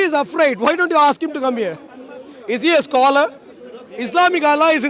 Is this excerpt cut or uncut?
uncut